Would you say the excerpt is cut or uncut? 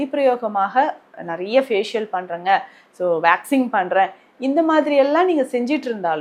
uncut